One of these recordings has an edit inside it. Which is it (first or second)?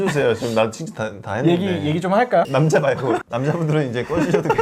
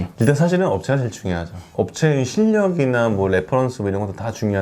second